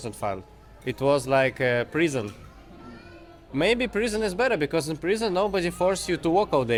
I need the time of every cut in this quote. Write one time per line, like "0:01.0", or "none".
none